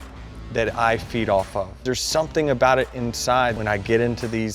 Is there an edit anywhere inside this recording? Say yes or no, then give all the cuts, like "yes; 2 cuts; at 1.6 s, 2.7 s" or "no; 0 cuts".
yes; 2 cuts; at 1.8 s, 3.6 s